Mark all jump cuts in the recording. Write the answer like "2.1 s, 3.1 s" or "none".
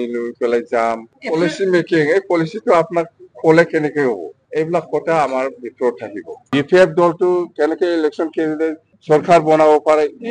1.1 s, 4.4 s, 6.4 s